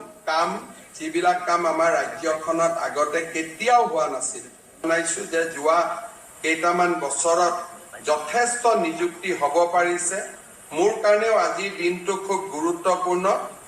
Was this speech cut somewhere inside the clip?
yes; 1 cut; at 4.8 s

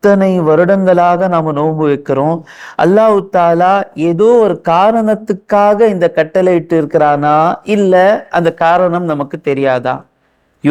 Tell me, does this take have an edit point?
no; 0 cuts

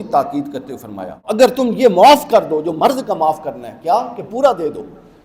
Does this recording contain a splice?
yes; 1 cut; at 1.4 s

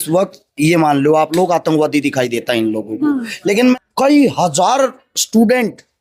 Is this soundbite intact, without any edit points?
no; 1 cut; at 3.8 s

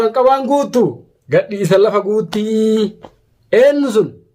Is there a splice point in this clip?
no; 0 cuts

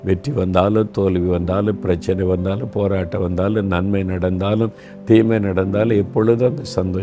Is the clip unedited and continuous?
yes; 0 cuts

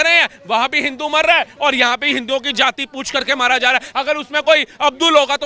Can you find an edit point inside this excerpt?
no; 0 cuts

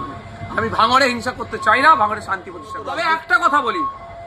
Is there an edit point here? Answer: yes; 1 cut; at 2.8 s

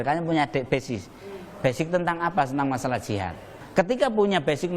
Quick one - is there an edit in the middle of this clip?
no; 0 cuts

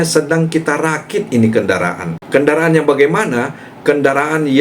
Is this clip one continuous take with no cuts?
no; 1 cut; at 2.1 s

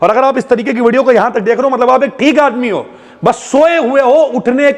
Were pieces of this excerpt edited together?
no; 0 cuts

